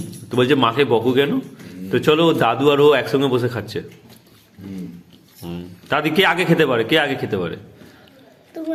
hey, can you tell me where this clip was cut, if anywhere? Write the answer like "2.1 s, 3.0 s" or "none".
none